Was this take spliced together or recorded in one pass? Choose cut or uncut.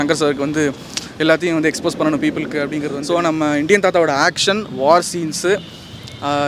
cut